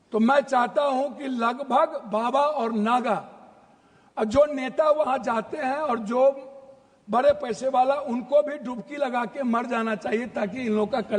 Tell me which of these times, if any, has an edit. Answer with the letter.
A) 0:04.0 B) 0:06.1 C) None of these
C